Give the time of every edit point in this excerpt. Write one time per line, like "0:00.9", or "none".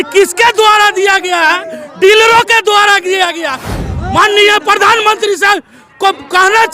0:03.8